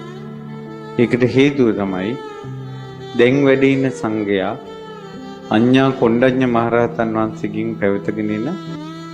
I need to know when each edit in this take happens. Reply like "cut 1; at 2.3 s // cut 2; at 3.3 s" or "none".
cut 1; at 6.3 s